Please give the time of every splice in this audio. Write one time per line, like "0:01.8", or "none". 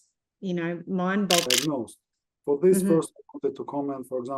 0:01.5